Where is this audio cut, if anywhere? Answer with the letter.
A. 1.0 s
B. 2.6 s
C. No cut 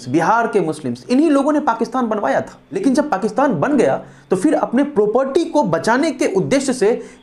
B